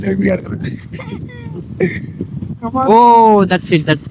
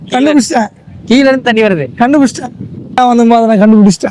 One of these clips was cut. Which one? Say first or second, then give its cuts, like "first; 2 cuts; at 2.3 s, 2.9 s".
second; 1 cut; at 3.0 s